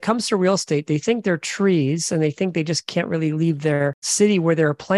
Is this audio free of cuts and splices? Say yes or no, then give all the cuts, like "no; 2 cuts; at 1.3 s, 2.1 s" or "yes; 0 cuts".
no; 1 cut; at 4.0 s